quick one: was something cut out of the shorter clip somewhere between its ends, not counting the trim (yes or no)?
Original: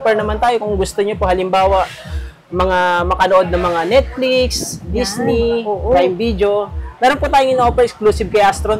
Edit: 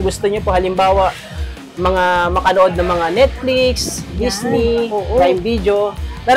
no